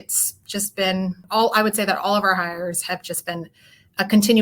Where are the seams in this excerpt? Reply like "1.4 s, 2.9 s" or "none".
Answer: 1.2 s